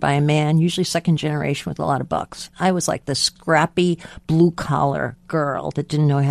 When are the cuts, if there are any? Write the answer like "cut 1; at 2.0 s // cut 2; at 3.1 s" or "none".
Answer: cut 1; at 2.5 s // cut 2; at 3.3 s